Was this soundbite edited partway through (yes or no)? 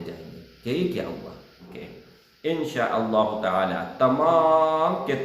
yes